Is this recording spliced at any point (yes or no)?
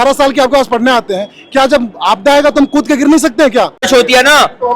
yes